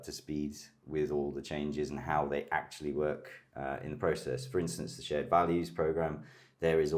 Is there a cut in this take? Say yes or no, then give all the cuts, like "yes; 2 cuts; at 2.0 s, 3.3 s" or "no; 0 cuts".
no; 0 cuts